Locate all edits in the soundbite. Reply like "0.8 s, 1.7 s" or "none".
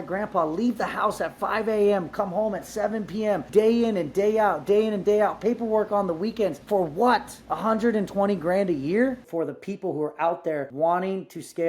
3.4 s, 6.6 s, 7.4 s, 9.2 s, 10.7 s